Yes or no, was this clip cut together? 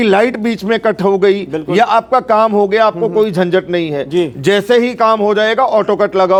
no